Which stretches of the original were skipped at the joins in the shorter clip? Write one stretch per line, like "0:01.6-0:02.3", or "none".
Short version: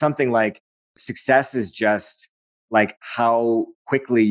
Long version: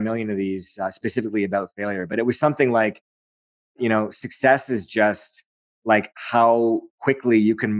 0:03.5-0:04.2